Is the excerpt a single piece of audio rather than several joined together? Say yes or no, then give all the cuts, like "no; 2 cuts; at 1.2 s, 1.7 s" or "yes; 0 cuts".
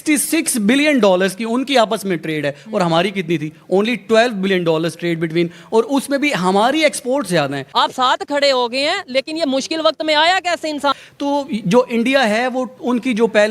no; 2 cuts; at 7.6 s, 11.0 s